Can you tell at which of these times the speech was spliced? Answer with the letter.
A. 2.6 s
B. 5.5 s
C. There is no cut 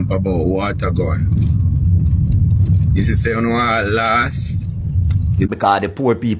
B